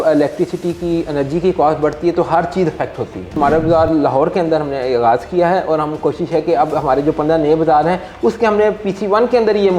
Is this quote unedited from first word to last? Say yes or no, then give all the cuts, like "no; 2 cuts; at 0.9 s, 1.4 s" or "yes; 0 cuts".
no; 1 cut; at 3.4 s